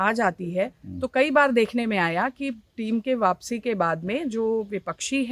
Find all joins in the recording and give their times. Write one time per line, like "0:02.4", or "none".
none